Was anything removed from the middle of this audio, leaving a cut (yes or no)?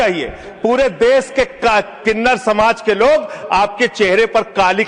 no